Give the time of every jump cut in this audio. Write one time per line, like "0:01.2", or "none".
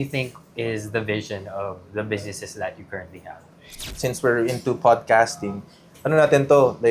0:03.8